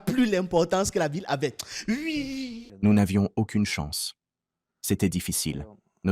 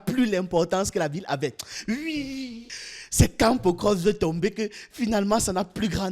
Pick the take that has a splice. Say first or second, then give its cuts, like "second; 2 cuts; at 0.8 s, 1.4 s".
first; 1 cut; at 2.6 s